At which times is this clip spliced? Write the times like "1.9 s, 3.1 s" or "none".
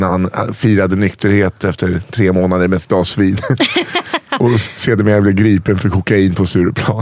none